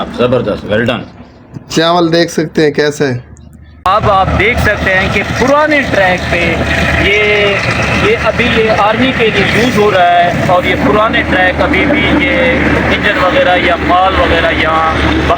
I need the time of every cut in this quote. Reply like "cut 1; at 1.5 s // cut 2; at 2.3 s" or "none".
cut 1; at 3.7 s